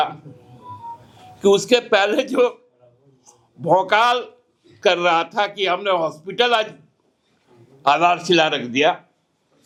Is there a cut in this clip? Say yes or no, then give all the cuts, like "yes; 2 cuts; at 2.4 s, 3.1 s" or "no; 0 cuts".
no; 0 cuts